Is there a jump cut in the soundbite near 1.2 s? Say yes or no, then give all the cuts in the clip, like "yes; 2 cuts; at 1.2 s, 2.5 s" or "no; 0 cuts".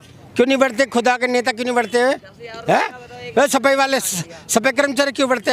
no; 0 cuts